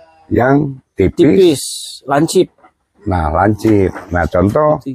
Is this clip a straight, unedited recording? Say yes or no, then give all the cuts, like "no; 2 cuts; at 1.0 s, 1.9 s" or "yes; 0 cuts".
yes; 0 cuts